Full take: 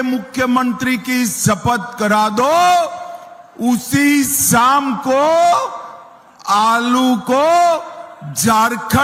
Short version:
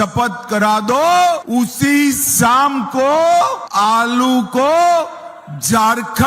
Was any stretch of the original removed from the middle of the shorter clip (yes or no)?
yes